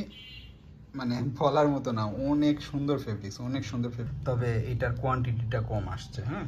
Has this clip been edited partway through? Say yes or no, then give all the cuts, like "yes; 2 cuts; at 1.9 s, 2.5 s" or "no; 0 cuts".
yes; 1 cut; at 4.0 s